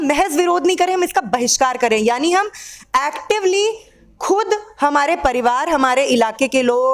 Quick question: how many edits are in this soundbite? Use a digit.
0